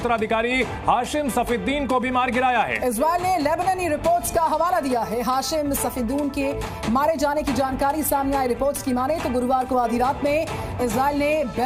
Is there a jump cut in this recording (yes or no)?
no